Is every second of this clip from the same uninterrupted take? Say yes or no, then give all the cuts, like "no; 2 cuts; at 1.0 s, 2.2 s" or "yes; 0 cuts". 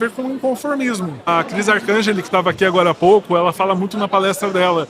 no; 1 cut; at 1.3 s